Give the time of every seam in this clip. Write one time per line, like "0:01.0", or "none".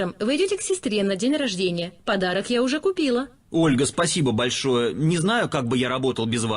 0:02.0
0:03.4